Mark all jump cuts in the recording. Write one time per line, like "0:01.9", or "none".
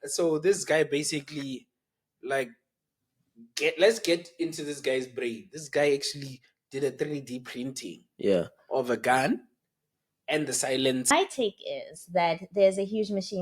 0:11.1